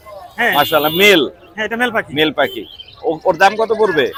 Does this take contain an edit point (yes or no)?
no